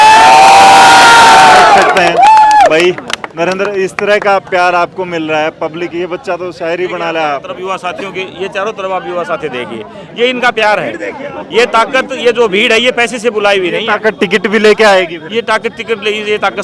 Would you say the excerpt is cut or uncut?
uncut